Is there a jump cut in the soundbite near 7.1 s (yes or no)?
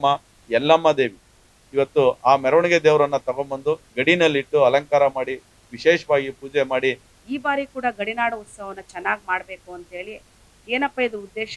yes